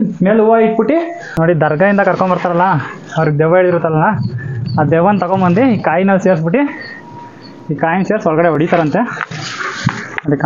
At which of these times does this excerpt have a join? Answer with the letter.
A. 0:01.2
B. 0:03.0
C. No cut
A